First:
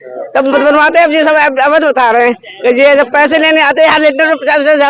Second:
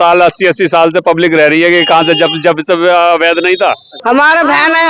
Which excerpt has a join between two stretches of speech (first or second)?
second